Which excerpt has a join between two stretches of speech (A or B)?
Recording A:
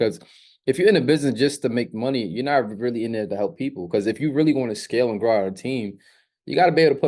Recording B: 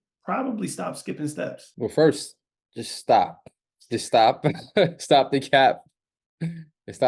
B